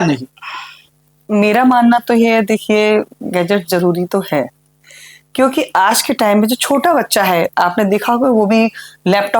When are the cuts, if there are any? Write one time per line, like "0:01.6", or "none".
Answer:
none